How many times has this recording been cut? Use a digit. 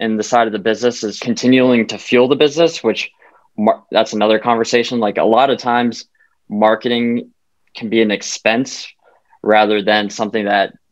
1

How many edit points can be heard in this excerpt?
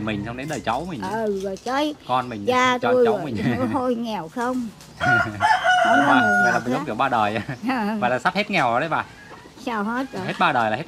0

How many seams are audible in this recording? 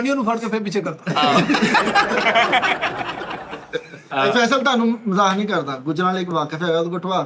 1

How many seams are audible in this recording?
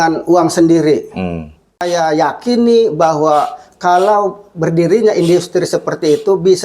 1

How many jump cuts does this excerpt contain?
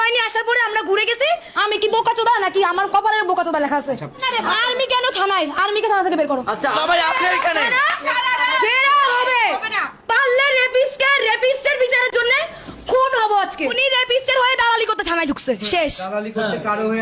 4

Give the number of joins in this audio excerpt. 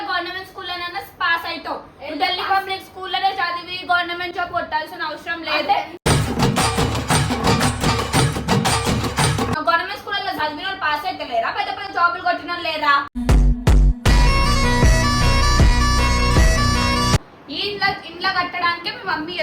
2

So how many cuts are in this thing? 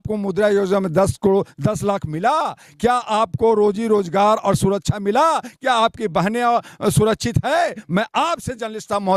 0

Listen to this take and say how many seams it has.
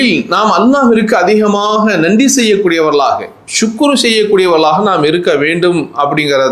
0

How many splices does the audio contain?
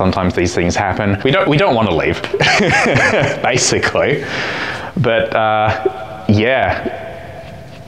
1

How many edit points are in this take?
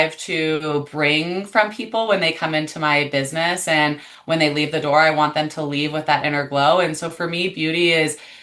0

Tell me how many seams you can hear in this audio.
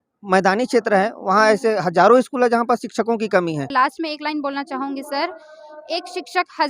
1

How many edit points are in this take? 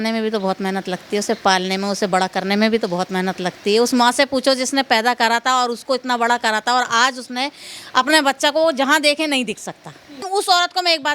1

